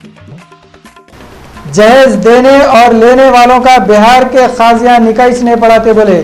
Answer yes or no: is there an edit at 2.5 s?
no